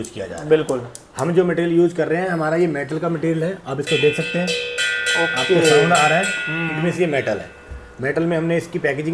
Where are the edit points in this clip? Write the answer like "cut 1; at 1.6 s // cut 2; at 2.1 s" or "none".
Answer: none